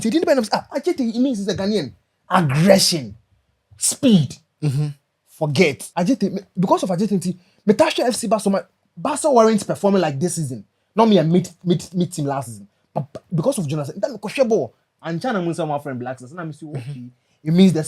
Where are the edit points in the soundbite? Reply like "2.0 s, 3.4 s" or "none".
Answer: 5.8 s

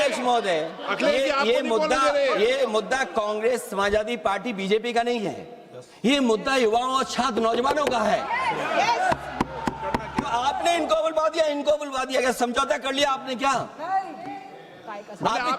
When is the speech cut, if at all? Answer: none

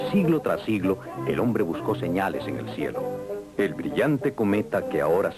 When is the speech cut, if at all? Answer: none

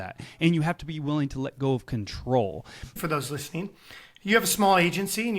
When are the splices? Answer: 3.0 s

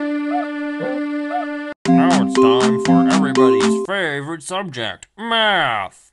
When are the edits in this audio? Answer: 1.8 s

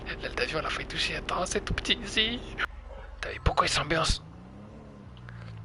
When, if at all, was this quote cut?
2.6 s

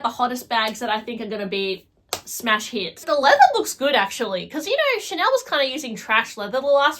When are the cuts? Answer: 3.0 s

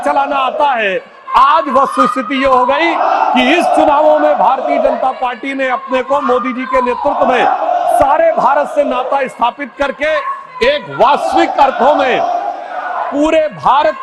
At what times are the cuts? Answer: none

